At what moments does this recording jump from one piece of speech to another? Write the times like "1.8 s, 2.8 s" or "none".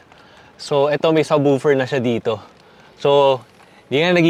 none